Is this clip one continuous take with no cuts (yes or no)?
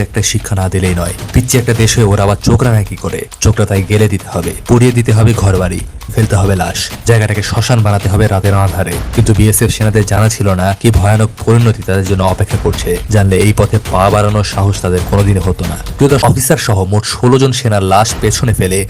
no